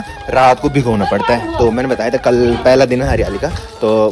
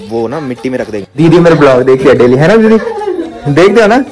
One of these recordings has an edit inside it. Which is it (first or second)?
second